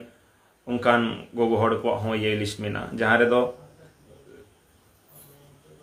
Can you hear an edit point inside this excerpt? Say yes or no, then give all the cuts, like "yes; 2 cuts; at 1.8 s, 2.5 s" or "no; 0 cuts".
no; 0 cuts